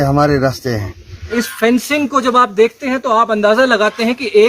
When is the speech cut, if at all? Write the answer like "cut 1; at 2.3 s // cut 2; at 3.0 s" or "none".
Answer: cut 1; at 1.3 s